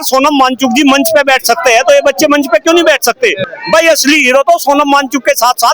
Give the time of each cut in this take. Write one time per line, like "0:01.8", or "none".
0:03.4

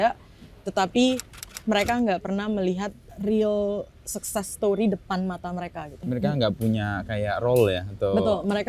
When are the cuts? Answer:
0:03.0
0:06.0

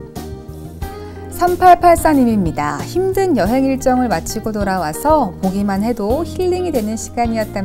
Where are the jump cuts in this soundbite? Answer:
0:01.4

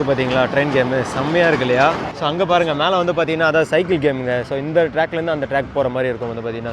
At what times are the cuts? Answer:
0:02.1

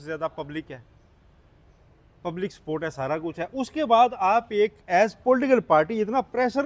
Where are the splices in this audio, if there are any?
none

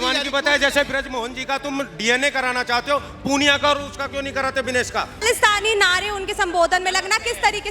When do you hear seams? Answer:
0:05.2

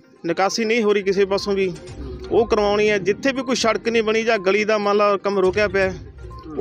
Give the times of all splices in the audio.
none

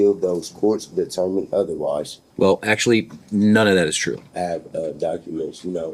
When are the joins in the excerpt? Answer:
0:02.2
0:04.3

